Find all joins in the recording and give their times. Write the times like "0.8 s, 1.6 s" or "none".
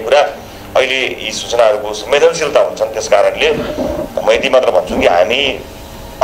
none